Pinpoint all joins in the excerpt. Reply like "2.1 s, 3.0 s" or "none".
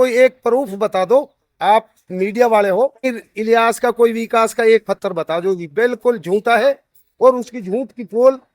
3.1 s